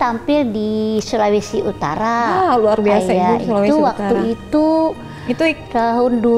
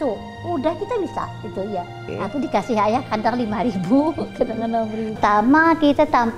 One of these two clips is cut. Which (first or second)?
second